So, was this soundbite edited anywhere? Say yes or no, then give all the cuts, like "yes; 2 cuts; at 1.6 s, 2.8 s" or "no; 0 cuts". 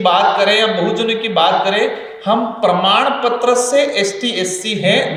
no; 0 cuts